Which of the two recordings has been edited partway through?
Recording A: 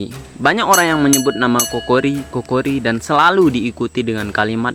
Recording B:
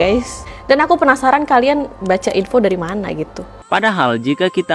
B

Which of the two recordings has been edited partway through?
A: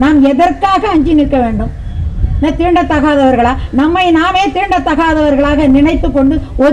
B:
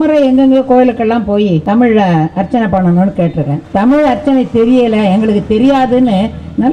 B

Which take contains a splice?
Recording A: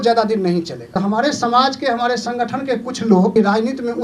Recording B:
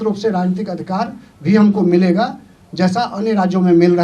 A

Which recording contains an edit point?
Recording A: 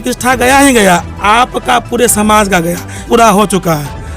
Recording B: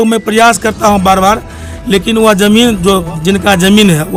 A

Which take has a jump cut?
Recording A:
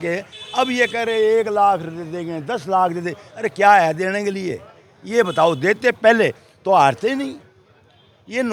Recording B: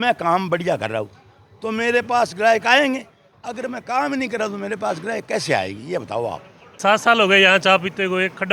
B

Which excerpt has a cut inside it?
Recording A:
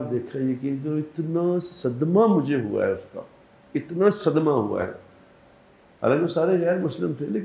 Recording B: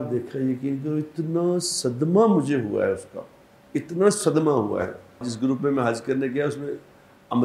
B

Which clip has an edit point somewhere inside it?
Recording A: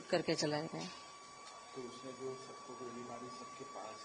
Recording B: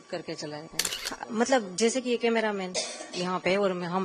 B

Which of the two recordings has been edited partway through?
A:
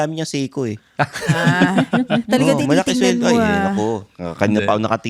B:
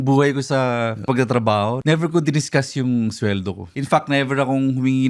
B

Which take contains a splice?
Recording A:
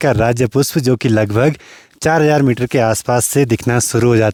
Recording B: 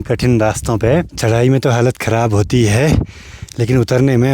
B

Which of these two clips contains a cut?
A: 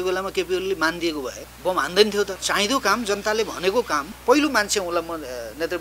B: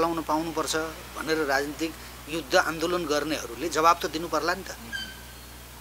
A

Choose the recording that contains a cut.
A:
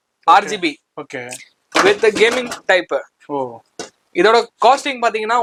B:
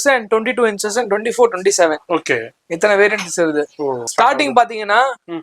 B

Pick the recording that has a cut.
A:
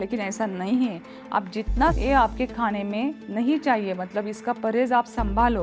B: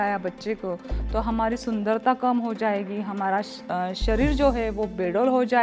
A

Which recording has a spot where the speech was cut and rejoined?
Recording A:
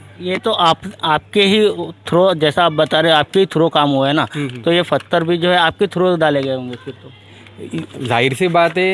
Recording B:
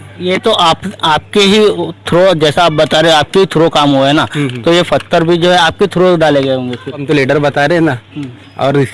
B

